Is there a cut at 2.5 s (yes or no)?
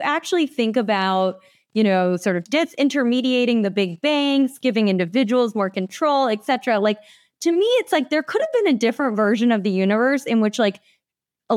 yes